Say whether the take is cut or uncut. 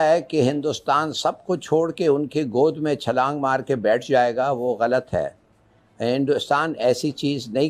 uncut